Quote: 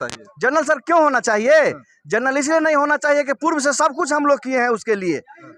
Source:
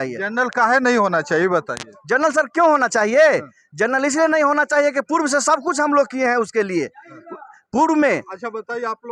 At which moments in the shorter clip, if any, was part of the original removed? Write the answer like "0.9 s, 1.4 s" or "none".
none